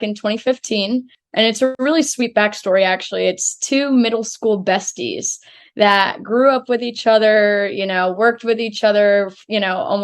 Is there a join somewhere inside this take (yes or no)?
yes